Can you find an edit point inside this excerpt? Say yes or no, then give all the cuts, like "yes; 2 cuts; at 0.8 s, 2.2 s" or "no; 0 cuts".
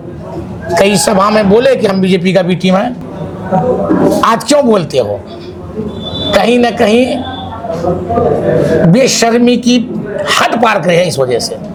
no; 0 cuts